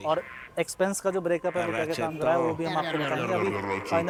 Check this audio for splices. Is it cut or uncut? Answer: uncut